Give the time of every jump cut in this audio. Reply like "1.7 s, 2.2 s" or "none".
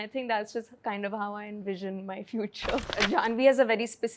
2.9 s